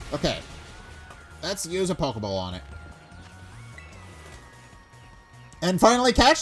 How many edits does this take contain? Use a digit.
2